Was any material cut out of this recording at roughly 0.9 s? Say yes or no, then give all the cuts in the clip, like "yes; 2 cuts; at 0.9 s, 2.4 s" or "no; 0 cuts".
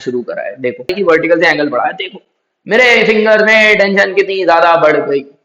yes; 1 cut; at 0.9 s